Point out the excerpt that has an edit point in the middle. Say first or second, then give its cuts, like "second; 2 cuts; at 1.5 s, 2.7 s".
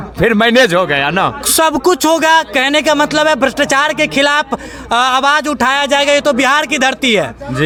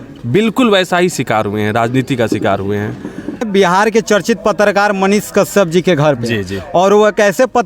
second; 1 cut; at 3.4 s